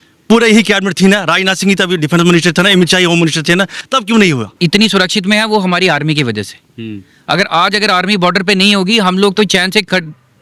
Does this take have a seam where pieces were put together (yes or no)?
yes